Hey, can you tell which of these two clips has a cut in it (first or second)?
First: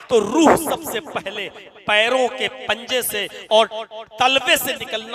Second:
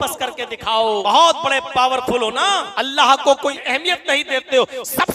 second